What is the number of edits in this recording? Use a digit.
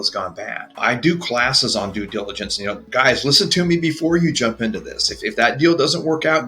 2